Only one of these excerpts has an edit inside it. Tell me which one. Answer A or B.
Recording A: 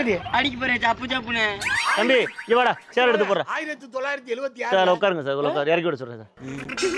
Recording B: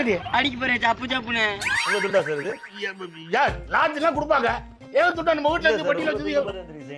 A